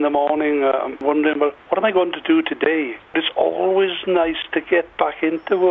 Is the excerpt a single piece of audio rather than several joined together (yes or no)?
no